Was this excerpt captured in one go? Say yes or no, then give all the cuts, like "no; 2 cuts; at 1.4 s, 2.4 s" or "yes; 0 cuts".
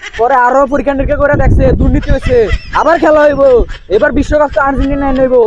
yes; 0 cuts